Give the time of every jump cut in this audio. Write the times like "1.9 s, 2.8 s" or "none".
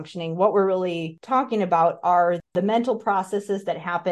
1.1 s, 2.5 s